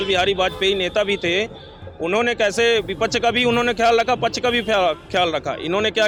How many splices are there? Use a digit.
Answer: 0